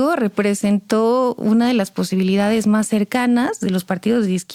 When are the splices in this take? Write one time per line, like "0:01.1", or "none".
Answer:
none